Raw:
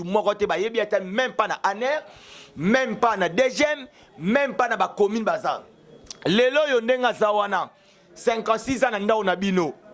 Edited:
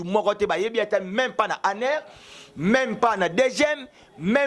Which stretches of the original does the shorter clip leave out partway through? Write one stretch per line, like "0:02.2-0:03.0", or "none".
none